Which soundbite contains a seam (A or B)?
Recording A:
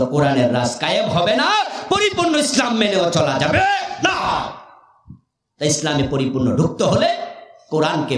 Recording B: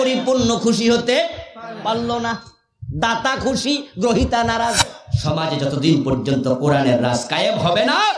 B